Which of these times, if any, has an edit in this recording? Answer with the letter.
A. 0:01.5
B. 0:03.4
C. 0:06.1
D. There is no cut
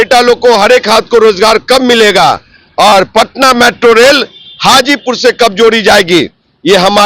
D